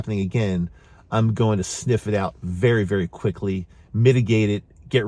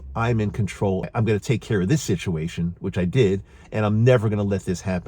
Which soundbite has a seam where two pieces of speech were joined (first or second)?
second